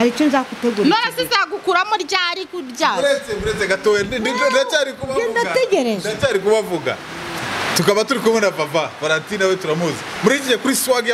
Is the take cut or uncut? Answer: uncut